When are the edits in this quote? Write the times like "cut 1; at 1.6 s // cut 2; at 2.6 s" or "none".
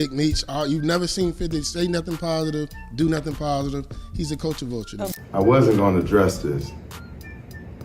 cut 1; at 5.2 s